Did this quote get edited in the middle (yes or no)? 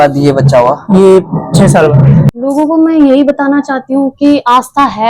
yes